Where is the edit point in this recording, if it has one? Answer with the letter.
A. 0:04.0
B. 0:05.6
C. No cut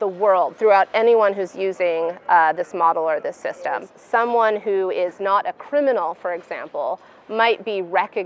A